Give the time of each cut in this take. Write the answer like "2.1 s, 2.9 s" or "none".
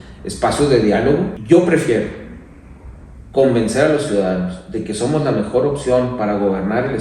1.4 s